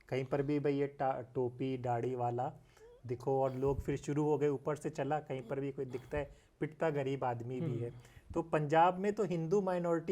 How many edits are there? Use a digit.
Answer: 0